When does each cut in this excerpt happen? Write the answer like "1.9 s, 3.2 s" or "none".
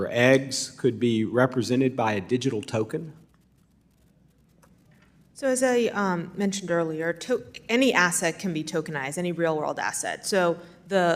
none